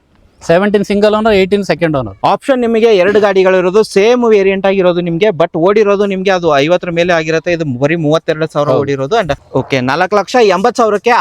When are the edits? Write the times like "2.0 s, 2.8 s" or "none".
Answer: 2.1 s, 9.4 s